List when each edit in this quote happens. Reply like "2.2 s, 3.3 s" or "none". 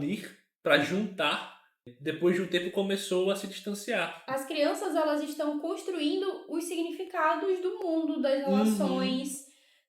1.8 s, 4.2 s